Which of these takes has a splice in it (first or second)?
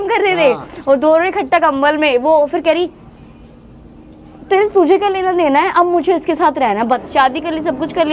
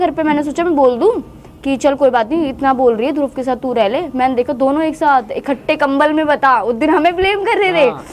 first